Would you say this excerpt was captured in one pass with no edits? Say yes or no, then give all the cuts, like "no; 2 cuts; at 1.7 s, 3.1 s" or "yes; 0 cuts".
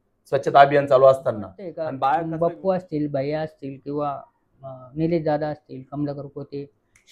no; 1 cut; at 2.0 s